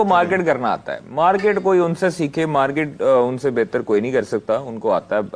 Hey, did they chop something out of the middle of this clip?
no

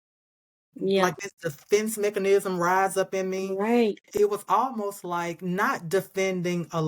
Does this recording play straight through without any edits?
no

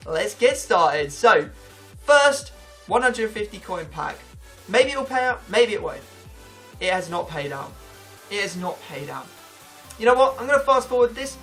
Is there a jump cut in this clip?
yes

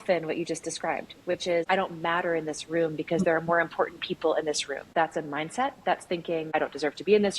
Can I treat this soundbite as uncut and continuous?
no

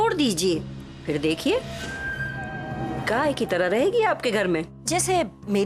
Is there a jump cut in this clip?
yes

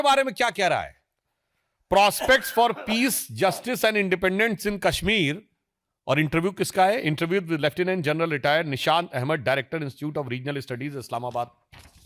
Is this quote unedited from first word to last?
yes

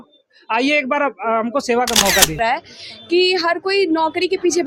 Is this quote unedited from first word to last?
no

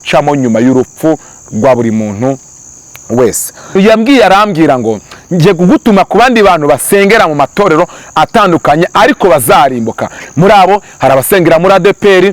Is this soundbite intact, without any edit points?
no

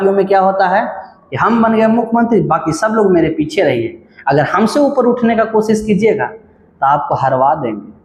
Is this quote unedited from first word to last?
yes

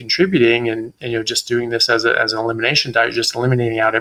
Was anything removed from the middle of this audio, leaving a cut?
no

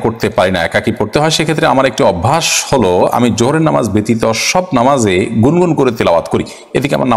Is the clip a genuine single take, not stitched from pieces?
yes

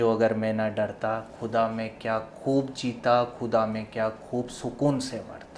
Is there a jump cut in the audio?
no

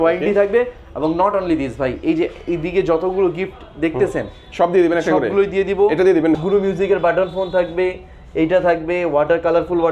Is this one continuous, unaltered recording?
no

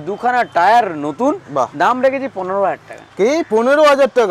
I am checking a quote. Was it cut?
no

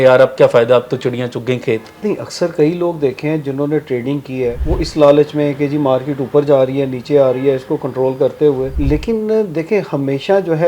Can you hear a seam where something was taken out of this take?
yes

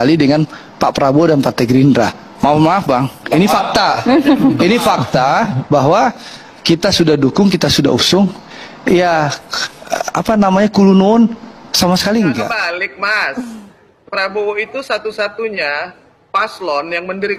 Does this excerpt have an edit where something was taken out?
yes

